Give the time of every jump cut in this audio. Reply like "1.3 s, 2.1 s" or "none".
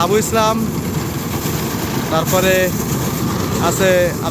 none